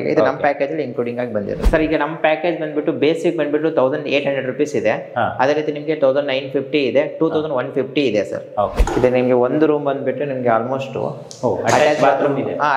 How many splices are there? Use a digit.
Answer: 2